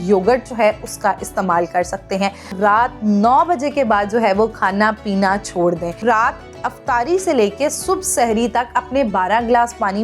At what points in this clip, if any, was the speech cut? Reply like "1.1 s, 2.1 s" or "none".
2.5 s, 6.0 s

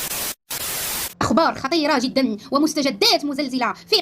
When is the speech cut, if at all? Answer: 1.1 s

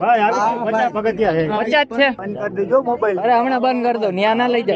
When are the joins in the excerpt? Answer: 2.2 s

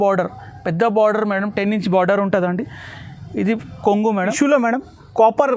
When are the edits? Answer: 4.2 s

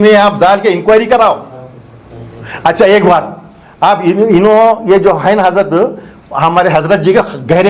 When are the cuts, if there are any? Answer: none

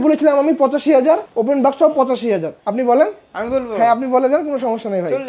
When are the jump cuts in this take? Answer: 1.3 s, 2.6 s

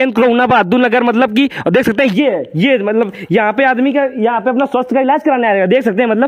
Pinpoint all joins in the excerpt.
none

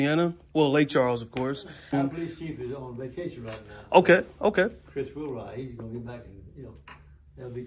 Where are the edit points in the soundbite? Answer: 1.9 s

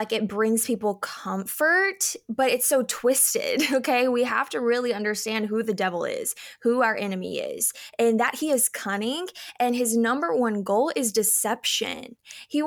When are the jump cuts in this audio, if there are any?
none

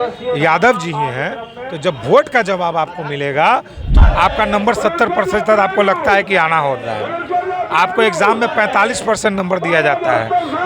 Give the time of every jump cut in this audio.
3.9 s

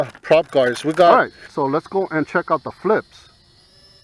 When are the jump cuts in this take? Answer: 1.1 s

